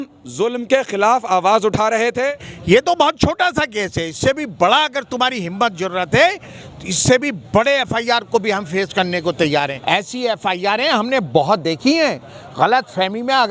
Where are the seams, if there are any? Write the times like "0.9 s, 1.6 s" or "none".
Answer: 2.5 s, 9.8 s